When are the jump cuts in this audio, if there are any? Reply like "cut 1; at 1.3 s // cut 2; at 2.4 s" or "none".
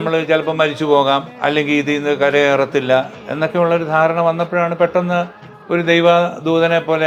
none